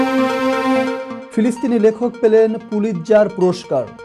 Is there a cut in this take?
yes; 1 cut; at 1.1 s

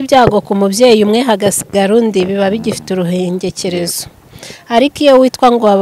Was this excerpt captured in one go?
yes; 0 cuts

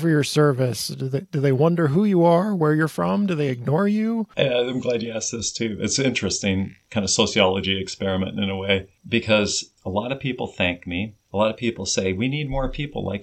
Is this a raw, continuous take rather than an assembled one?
no; 5 cuts; at 4.3 s, 6.8 s, 8.9 s, 9.7 s, 11.2 s

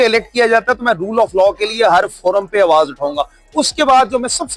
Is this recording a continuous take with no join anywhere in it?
yes; 0 cuts

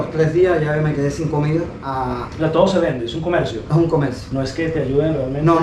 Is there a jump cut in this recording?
yes; 1 cut; at 1.9 s

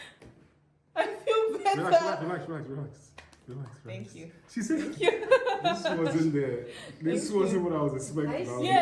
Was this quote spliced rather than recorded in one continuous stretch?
no; 0 cuts

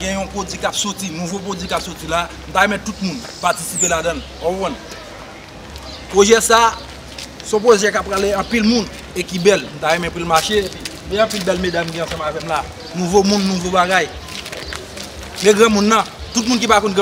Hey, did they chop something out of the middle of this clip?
yes; 1 cut; at 1.4 s

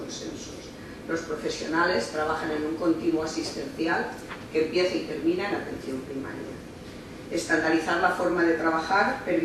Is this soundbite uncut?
no; 1 cut; at 3.0 s

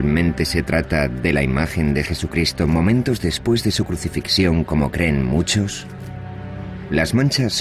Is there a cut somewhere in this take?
no; 0 cuts

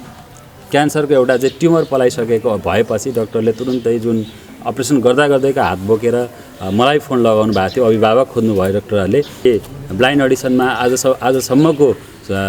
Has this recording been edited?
yes; 1 cut; at 9.5 s

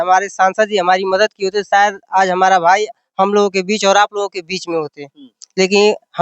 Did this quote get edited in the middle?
no; 0 cuts

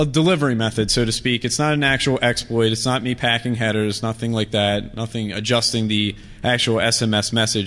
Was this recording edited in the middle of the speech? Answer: yes; 1 cut; at 4.9 s

